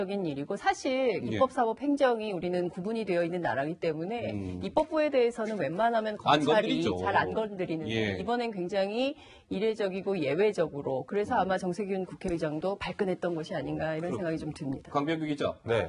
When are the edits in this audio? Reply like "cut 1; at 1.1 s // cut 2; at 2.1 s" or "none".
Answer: cut 1; at 13.4 s